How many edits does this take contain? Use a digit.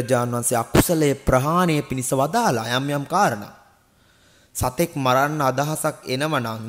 0